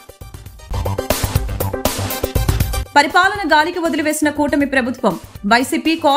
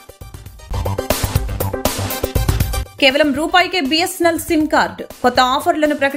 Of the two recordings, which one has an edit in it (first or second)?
second